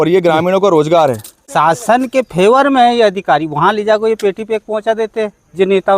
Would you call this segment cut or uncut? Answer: cut